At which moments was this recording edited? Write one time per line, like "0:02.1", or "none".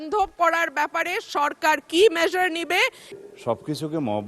0:03.0